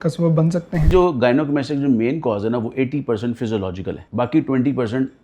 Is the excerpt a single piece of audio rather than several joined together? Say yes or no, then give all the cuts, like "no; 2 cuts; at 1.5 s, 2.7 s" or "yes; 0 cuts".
no; 2 cuts; at 0.9 s, 4.0 s